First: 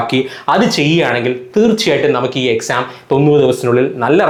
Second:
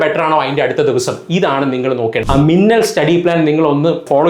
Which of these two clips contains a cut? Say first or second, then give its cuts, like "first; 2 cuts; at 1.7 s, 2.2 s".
second; 1 cut; at 2.2 s